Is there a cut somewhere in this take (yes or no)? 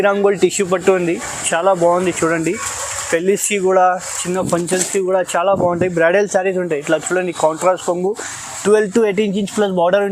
no